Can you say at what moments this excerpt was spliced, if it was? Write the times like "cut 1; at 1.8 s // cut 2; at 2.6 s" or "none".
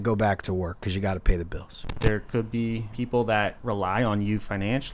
cut 1; at 1.9 s // cut 2; at 2.9 s // cut 3; at 3.6 s

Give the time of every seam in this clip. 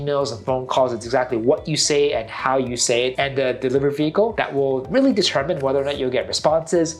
none

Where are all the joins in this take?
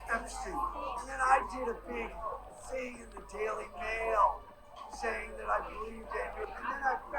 cut 1; at 1.1 s

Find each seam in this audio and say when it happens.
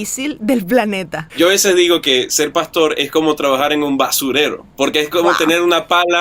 cut 1; at 1.3 s

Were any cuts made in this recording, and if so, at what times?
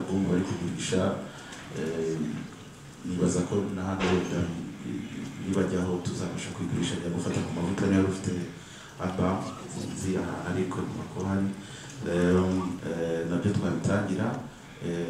cut 1; at 12.8 s

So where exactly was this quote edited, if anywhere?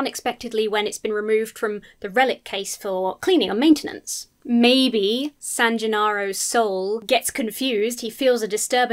cut 1; at 5.4 s // cut 2; at 7.0 s

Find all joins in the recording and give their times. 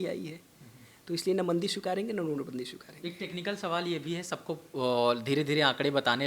none

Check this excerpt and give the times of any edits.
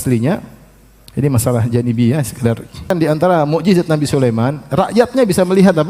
cut 1; at 2.9 s

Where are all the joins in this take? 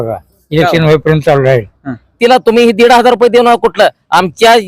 cut 1; at 2.2 s

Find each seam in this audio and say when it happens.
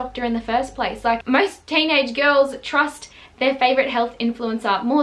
cut 1; at 1.2 s

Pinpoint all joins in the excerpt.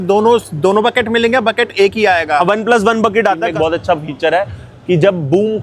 cut 1; at 3.5 s

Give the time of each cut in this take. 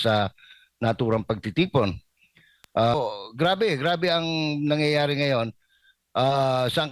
cut 1; at 2.9 s

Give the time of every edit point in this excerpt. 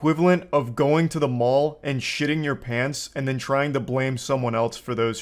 none

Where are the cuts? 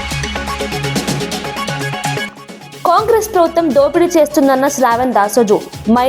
cut 1; at 2.2 s

